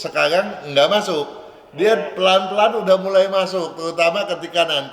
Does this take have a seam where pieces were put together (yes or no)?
no